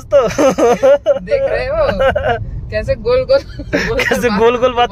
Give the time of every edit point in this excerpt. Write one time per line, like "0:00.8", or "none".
none